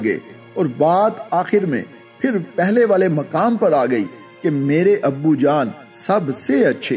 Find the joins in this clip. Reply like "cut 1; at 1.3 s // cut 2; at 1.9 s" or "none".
none